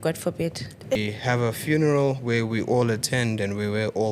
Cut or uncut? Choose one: cut